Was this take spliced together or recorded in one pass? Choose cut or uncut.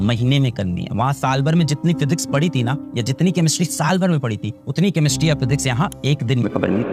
uncut